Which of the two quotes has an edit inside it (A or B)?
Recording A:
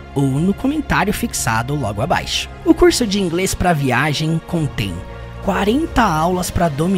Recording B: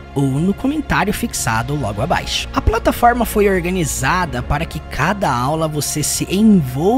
B